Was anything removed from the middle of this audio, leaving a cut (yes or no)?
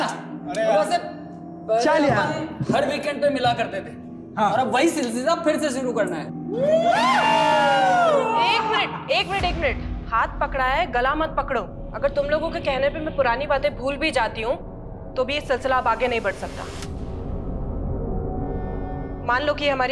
no